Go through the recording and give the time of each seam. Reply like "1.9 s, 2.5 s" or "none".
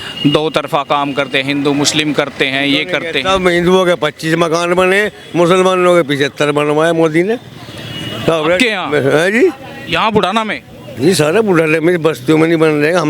none